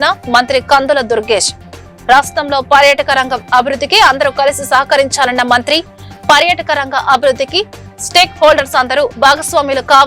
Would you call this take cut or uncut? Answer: uncut